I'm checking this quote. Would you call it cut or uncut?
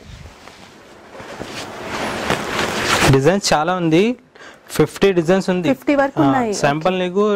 uncut